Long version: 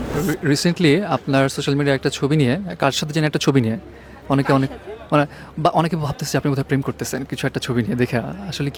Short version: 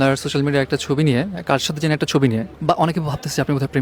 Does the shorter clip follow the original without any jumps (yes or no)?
no